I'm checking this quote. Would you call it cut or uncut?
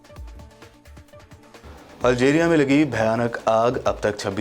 cut